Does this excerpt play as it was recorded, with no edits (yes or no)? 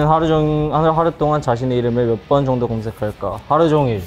yes